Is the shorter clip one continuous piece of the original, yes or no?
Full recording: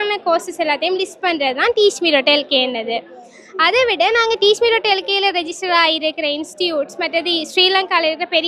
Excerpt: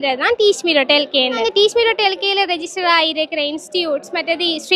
no